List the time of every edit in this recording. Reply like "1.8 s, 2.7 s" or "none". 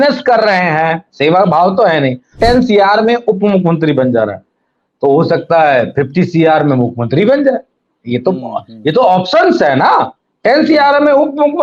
2.3 s